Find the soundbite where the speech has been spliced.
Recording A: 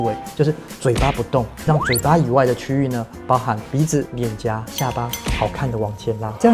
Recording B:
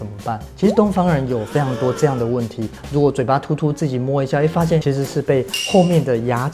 B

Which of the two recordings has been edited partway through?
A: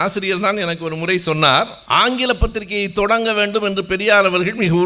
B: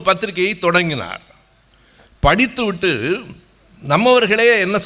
A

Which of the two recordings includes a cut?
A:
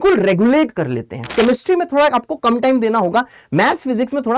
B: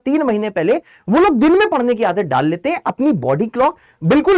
A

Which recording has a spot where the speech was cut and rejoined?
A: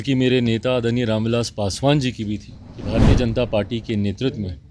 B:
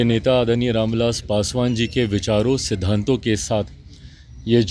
A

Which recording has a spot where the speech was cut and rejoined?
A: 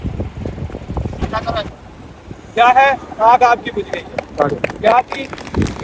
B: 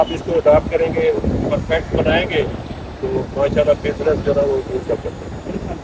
A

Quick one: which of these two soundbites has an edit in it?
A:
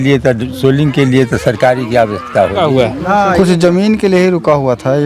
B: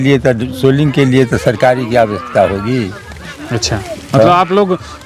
A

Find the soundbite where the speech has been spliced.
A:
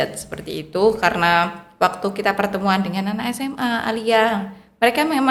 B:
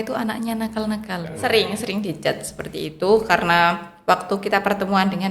B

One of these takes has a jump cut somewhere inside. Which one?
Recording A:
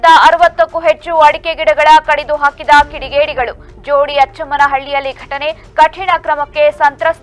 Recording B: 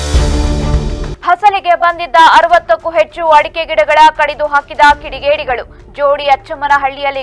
B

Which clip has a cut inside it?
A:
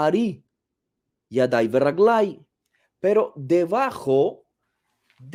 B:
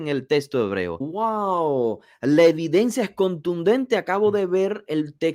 B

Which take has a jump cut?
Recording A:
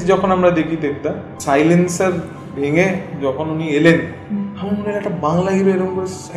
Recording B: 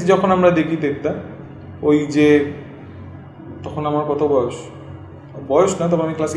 A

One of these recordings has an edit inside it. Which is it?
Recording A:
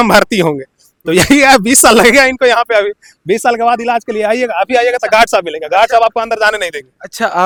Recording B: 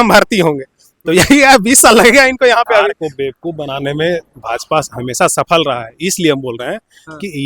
B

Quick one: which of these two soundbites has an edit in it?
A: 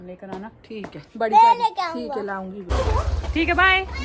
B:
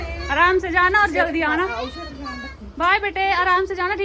A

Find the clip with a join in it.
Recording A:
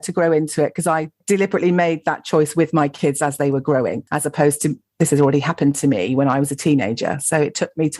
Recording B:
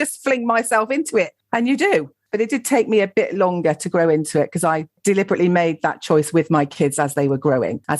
B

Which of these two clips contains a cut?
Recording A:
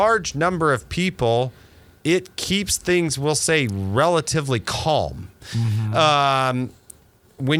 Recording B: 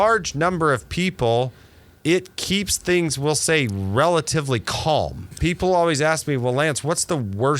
B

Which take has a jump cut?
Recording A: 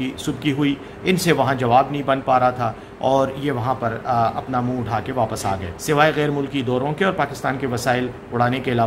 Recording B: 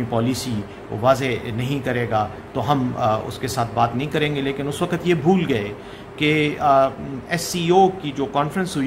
A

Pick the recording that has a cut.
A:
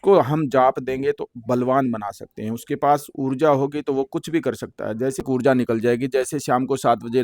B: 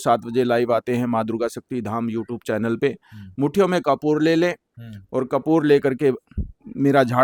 A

